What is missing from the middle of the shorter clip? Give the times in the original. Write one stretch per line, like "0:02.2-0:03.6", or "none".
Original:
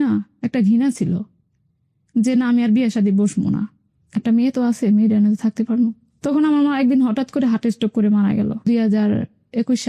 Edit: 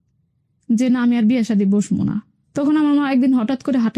0:03.9-0:06.1